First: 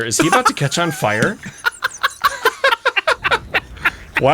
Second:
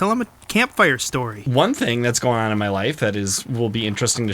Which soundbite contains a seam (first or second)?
second